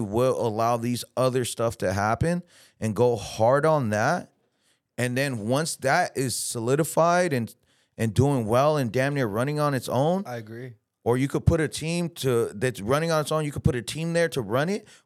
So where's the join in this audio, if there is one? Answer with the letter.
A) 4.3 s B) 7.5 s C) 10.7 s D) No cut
D